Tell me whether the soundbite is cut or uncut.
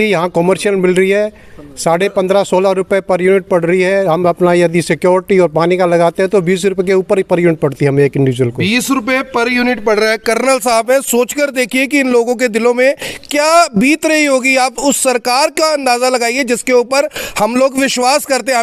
uncut